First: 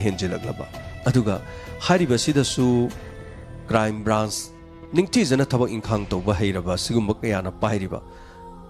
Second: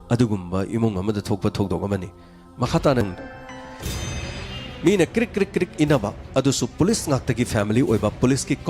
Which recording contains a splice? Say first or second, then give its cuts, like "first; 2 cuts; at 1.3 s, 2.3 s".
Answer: second; 1 cut; at 3.0 s